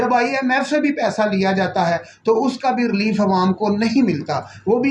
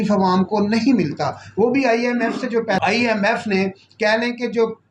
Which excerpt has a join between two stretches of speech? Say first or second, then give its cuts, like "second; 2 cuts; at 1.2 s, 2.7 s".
second; 1 cut; at 2.8 s